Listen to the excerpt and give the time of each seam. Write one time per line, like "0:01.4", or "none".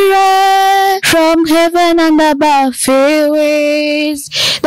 0:01.0